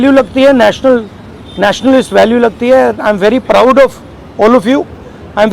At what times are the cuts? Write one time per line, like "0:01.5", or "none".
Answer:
none